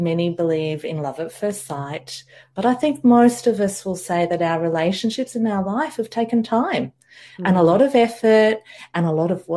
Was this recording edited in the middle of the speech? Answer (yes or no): no